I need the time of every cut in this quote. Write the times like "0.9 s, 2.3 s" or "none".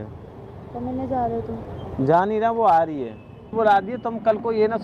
3.5 s